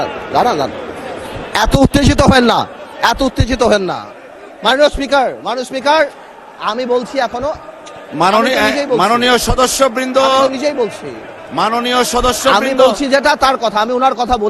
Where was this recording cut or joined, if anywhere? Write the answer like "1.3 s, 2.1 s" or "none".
none